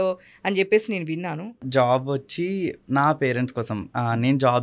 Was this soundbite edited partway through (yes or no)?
yes